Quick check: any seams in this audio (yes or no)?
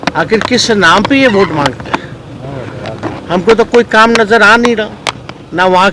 no